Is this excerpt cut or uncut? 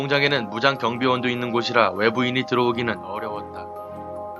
uncut